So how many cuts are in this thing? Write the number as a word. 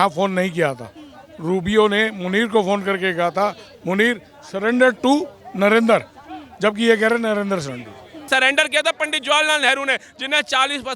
one